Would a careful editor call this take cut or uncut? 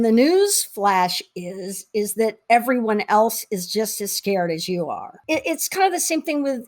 cut